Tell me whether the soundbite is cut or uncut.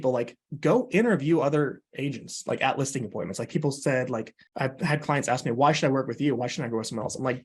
cut